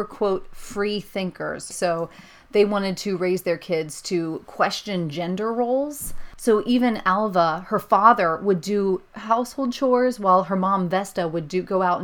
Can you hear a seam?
yes; 3 cuts; at 1.7 s, 6.4 s, 9.1 s

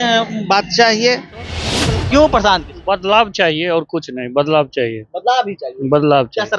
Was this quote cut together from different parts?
yes; 1 cut; at 1.6 s

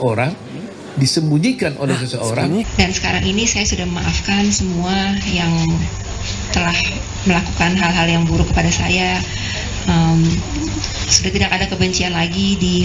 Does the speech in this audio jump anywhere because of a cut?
yes; 1 cut; at 2.7 s

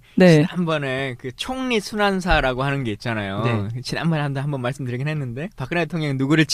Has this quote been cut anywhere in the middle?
no; 0 cuts

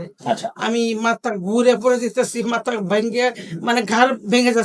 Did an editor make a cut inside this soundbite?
no; 0 cuts

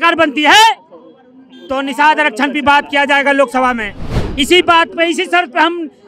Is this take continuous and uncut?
yes; 0 cuts

